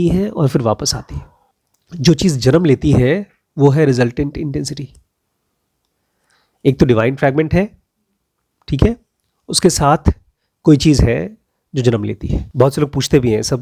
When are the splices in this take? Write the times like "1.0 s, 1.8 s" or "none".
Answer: 12.4 s